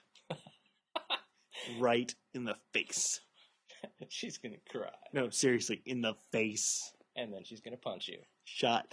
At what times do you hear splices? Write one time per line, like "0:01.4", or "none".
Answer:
none

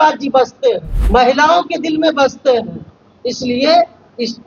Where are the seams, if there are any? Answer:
0:00.9

